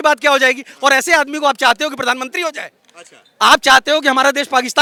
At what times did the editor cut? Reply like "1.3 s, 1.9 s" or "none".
none